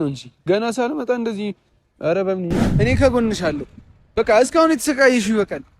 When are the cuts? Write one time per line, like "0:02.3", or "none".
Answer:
0:02.6